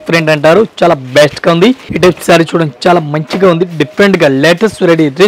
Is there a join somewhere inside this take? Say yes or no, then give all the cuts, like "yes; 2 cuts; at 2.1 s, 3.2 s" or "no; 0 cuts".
yes; 1 cut; at 1.9 s